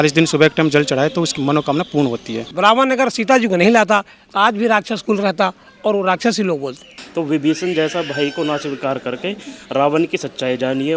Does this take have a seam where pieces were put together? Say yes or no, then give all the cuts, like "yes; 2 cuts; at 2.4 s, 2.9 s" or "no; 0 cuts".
yes; 3 cuts; at 1.3 s, 2.5 s, 6.9 s